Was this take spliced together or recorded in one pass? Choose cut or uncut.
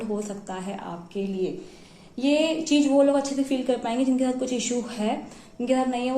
uncut